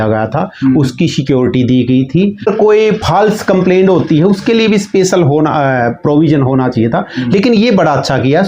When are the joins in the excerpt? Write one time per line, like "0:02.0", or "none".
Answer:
0:02.5